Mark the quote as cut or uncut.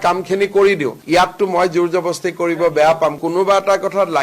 cut